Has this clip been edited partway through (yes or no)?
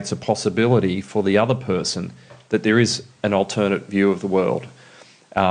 no